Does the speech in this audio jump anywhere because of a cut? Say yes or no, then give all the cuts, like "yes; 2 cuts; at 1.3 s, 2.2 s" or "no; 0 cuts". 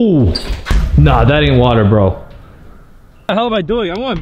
yes; 1 cut; at 3.3 s